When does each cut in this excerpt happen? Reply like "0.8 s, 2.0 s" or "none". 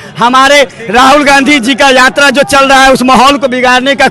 none